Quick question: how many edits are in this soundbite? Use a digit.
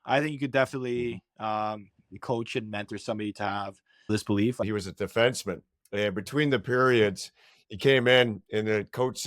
1